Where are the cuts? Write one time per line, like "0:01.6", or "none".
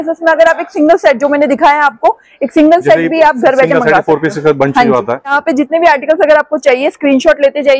0:05.4